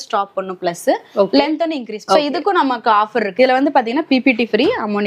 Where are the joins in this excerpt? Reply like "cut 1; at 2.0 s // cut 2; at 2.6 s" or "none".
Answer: cut 1; at 2.0 s // cut 2; at 3.3 s